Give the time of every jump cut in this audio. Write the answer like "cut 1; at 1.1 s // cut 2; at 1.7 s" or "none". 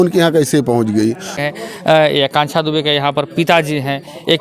cut 1; at 1.4 s